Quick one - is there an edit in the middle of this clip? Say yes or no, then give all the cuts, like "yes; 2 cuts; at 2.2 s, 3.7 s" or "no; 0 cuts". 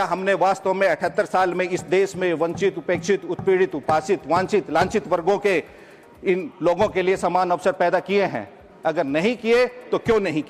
no; 0 cuts